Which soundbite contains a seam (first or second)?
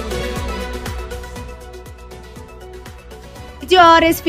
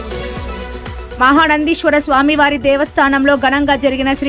first